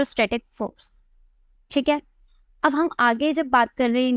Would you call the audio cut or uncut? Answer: uncut